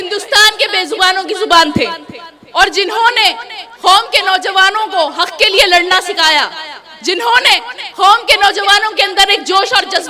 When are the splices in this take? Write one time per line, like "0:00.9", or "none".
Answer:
none

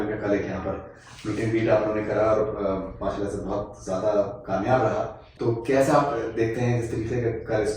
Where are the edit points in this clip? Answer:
0:05.3

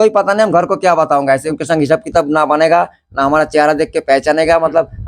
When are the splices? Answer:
0:01.5

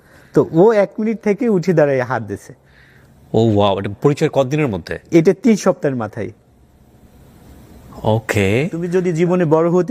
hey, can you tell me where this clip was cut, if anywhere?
0:08.9

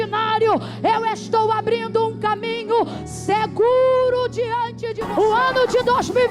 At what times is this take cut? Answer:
0:04.9

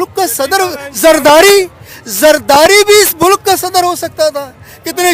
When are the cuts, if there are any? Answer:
none

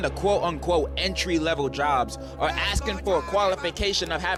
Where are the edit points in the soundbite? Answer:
none

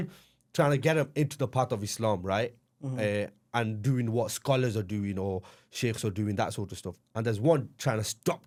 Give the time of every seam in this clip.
none

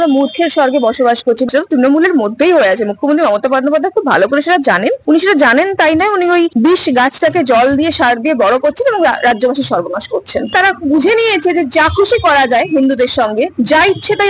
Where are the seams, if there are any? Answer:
0:01.5
0:05.0
0:06.5
0:10.5
0:13.5

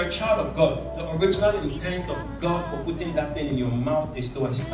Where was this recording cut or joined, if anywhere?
none

